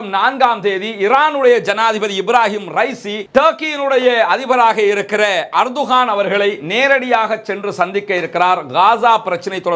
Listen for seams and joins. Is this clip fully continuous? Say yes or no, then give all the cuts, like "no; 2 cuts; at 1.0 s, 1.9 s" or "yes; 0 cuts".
yes; 0 cuts